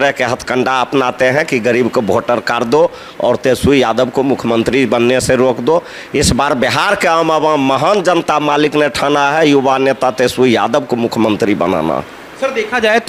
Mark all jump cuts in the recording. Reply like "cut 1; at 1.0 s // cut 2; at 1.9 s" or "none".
none